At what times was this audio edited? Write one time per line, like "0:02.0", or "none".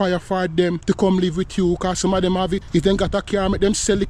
0:00.8
0:02.6